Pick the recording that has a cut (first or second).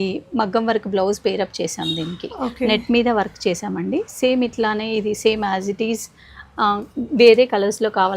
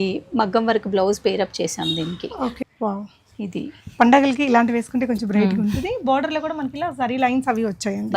second